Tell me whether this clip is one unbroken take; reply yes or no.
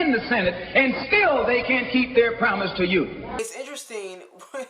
no